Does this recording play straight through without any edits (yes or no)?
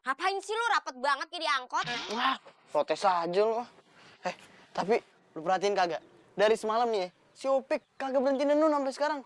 yes